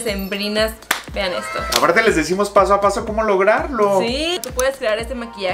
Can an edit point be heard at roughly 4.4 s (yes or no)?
yes